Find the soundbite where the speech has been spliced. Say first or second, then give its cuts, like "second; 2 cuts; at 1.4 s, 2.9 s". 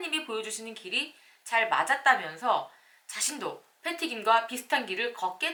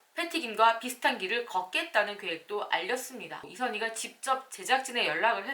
second; 1 cut; at 3.4 s